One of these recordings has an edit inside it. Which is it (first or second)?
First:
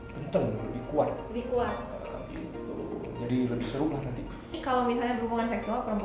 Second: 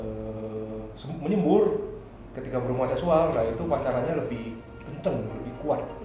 first